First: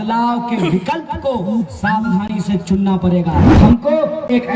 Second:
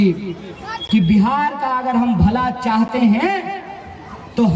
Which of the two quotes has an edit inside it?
first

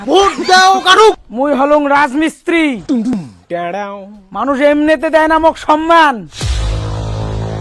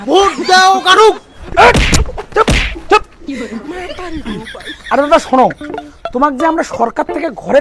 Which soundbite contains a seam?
first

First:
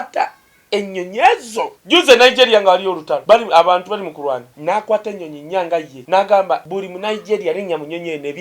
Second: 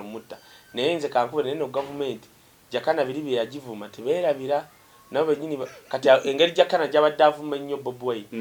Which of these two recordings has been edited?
first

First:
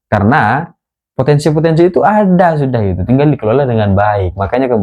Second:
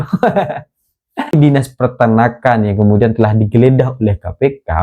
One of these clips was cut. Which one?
second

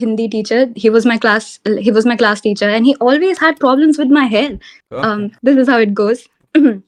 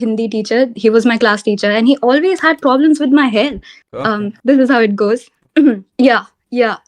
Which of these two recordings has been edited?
second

